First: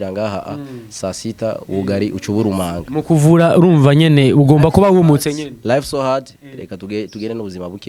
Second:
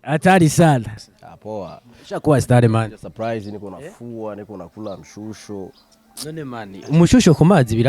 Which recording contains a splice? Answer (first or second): second